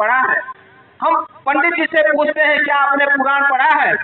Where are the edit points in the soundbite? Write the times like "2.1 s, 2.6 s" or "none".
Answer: none